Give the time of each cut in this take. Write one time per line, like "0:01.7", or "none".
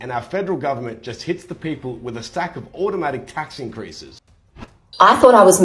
0:04.5